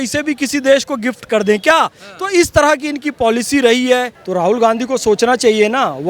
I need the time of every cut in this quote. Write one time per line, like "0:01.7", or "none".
0:04.2